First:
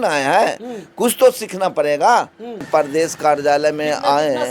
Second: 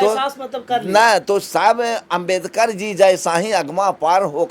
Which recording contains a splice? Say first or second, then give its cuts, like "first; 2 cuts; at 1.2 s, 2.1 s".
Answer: first; 1 cut; at 2.6 s